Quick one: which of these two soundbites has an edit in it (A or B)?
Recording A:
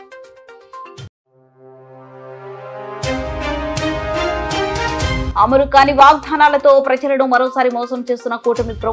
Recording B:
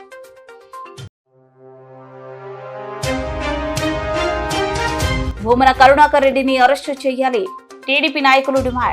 A